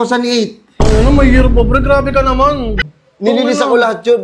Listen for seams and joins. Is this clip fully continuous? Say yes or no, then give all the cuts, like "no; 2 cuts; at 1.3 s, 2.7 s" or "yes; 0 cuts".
no; 1 cut; at 2.8 s